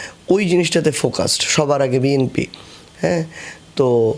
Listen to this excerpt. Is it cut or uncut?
uncut